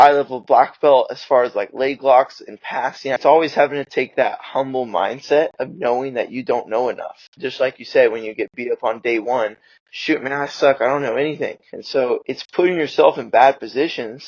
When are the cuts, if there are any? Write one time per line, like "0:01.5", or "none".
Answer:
0:03.2
0:07.3
0:12.1